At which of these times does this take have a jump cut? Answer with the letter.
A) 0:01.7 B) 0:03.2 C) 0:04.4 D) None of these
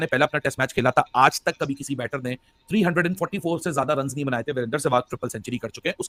D